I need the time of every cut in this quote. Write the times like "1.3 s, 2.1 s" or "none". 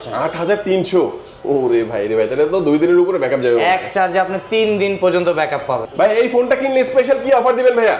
5.9 s